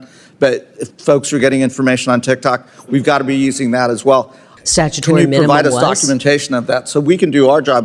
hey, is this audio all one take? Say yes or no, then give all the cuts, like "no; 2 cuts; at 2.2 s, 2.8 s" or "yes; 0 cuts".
no; 1 cut; at 4.5 s